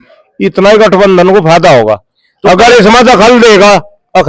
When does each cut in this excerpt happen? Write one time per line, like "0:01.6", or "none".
none